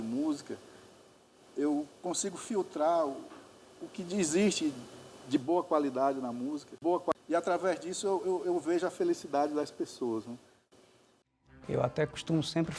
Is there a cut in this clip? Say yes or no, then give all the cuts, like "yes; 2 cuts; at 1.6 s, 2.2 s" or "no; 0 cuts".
yes; 1 cut; at 11.0 s